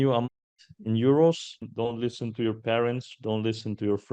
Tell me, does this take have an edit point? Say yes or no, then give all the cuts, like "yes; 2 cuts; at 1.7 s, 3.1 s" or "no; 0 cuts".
yes; 1 cut; at 1.6 s